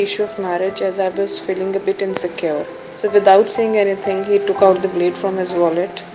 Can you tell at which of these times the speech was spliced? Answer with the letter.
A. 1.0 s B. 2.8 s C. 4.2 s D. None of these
B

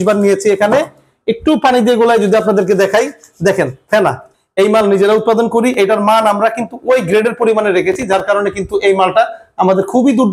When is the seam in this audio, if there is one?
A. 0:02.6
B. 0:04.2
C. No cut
B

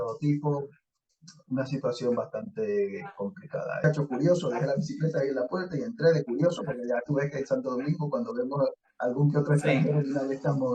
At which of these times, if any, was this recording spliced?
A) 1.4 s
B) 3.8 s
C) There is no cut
B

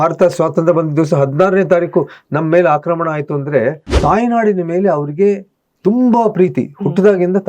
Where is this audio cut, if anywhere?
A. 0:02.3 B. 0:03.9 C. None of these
B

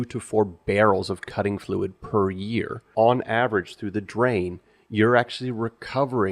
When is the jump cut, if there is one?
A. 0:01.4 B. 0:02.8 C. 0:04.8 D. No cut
B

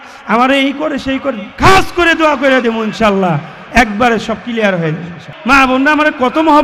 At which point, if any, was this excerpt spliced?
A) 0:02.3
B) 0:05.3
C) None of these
B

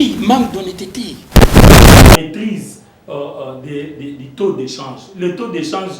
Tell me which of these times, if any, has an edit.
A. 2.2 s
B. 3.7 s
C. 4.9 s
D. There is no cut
A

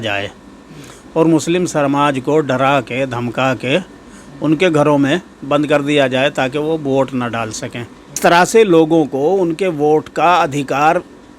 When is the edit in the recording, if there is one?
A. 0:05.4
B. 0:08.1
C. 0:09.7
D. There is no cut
B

